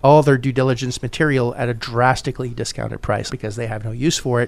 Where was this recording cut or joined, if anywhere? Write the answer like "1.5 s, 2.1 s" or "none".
3.3 s